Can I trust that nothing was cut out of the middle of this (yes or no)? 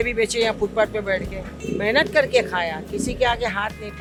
yes